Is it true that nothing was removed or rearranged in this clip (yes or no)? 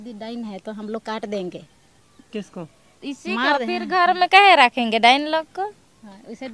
yes